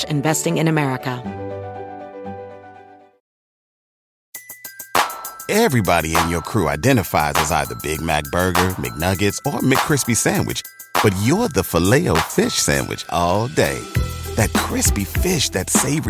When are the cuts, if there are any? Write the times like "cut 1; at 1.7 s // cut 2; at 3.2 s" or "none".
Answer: cut 1; at 1.2 s